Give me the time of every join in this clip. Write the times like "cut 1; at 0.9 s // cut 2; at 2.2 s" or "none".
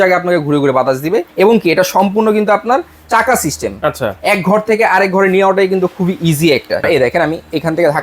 cut 1; at 1.3 s // cut 2; at 6.9 s